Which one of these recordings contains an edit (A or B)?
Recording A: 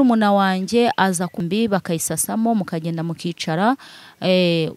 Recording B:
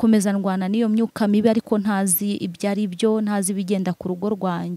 A